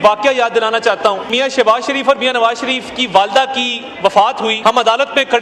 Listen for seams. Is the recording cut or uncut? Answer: cut